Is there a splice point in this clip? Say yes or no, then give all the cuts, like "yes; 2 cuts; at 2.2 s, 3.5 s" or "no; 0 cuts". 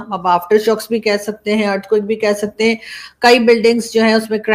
no; 0 cuts